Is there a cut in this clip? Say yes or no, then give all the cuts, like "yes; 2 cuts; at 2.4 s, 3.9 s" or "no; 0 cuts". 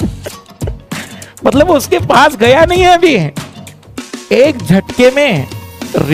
no; 0 cuts